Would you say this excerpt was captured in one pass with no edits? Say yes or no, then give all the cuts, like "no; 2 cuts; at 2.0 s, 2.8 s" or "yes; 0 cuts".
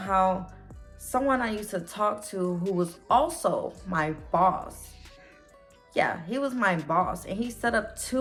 yes; 0 cuts